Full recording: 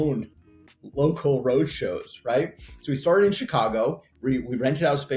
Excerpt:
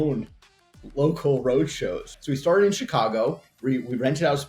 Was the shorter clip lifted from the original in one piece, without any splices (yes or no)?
no